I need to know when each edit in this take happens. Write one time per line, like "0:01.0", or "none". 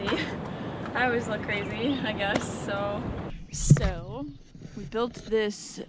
0:03.2